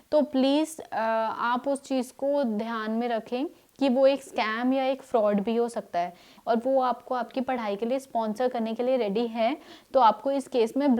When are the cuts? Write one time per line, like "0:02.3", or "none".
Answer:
0:06.3